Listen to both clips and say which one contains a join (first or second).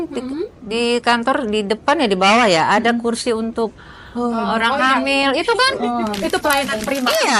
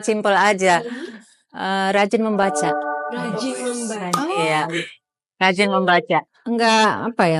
second